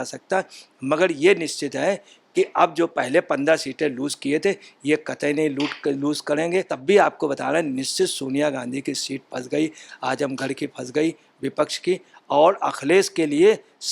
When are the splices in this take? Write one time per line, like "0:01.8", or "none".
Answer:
0:06.7